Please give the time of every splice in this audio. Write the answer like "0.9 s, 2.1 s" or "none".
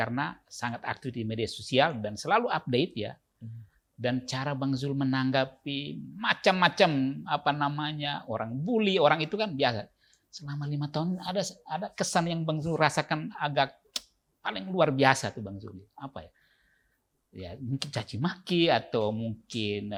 none